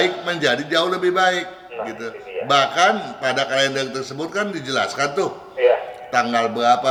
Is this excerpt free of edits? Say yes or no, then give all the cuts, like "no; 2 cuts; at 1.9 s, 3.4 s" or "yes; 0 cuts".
yes; 0 cuts